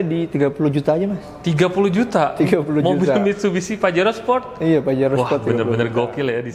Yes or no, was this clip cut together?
no